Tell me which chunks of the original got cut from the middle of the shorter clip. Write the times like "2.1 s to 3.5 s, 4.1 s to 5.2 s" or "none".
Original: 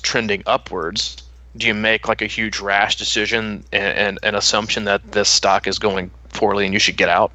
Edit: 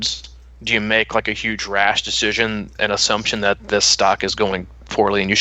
3.7 s to 4.2 s

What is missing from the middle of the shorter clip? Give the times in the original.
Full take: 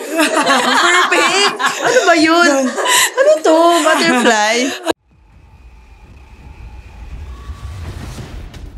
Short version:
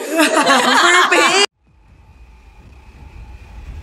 1.5 s to 5.0 s

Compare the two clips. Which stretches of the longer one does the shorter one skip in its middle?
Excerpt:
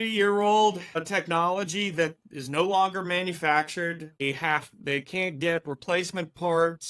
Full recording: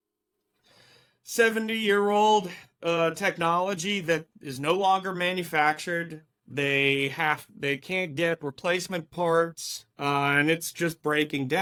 2.7 s to 3.1 s, 6.3 s to 7.0 s

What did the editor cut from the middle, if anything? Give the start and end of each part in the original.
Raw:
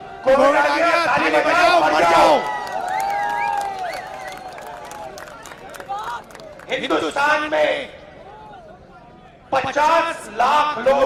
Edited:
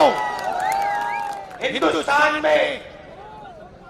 3.7 s to 6.5 s

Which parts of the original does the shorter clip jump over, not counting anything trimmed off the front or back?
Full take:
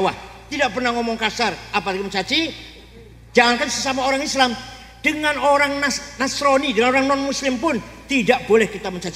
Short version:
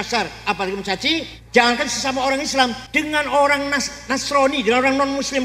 2.6 s to 3.2 s, 4.6 s to 4.9 s

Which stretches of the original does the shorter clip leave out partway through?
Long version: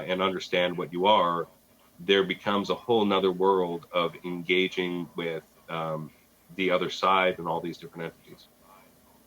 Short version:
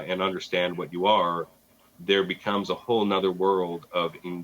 none

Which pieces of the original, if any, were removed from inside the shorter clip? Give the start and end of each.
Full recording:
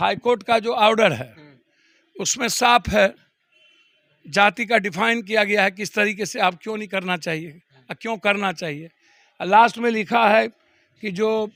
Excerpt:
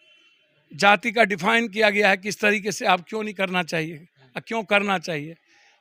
none

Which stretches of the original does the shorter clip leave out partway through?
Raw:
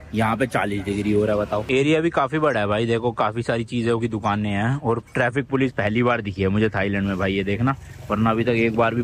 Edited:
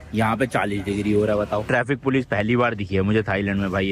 1.6 s to 5.1 s

